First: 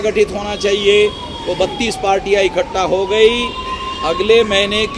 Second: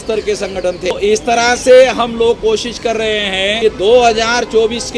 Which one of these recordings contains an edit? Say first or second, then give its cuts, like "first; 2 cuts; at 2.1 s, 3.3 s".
second; 2 cuts; at 0.9 s, 3.6 s